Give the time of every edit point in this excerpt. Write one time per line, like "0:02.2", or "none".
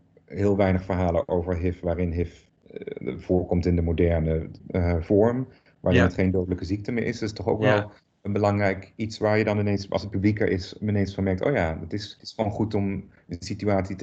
0:02.5
0:04.6
0:12.1